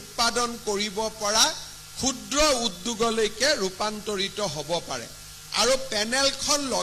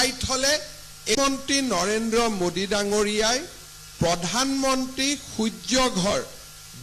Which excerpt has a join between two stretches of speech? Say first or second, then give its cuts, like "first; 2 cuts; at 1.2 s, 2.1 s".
second; 1 cut; at 1.2 s